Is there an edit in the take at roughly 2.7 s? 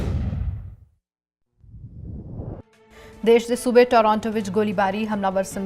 yes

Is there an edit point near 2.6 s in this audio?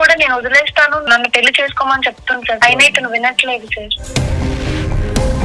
yes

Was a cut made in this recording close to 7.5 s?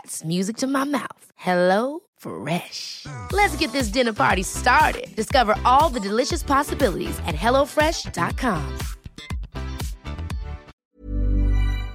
no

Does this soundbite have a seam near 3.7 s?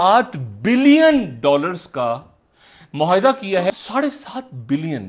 yes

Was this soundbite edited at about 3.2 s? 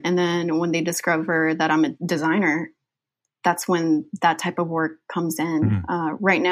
yes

